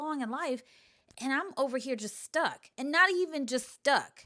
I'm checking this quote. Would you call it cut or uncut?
uncut